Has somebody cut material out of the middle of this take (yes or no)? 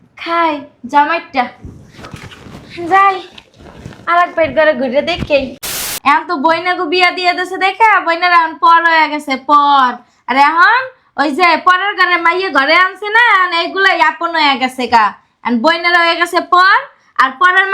yes